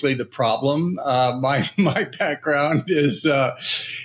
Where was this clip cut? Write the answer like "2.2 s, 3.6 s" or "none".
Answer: none